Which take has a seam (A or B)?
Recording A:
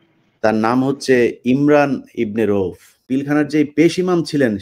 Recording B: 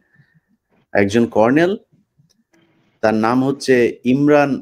A